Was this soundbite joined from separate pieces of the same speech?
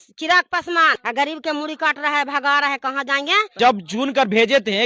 yes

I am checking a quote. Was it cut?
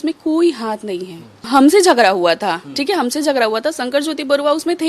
yes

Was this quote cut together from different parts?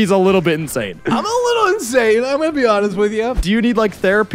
yes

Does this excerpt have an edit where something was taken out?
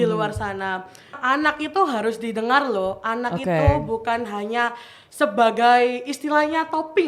yes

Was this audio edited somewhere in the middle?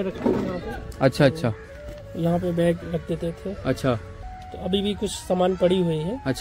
no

